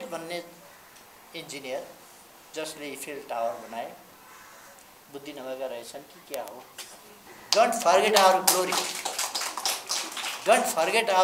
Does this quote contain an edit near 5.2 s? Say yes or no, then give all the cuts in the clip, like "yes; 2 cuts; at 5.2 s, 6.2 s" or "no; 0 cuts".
no; 1 cut; at 7.2 s